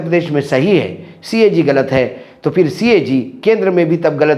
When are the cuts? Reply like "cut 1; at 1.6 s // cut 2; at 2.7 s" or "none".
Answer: none